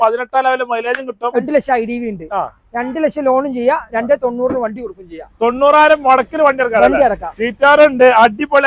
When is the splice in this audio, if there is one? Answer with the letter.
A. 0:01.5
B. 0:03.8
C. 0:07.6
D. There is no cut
A